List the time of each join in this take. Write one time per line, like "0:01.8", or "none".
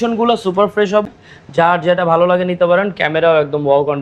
0:01.0